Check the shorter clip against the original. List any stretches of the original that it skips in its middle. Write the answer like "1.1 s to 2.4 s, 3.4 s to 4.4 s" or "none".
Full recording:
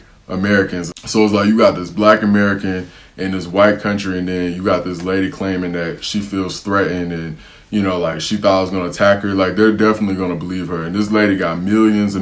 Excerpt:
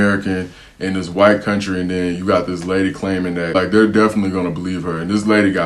5.9 s to 9.4 s